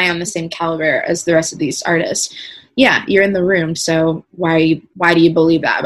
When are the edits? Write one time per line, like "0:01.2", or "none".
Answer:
0:04.9